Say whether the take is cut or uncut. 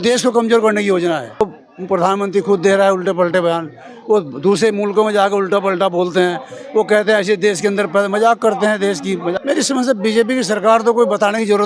cut